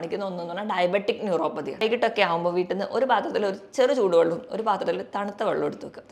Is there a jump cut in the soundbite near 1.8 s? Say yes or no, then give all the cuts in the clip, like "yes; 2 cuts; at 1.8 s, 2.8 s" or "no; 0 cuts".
yes; 1 cut; at 1.8 s